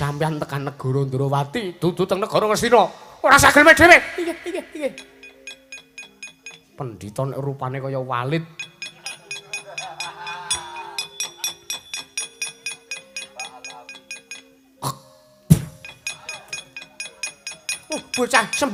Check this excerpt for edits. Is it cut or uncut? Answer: uncut